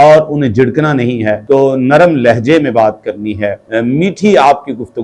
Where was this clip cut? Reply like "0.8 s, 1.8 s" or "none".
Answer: 1.4 s, 3.7 s